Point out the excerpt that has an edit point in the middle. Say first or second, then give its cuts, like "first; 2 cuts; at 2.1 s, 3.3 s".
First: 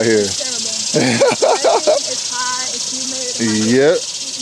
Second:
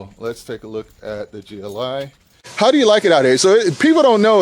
second; 1 cut; at 2.4 s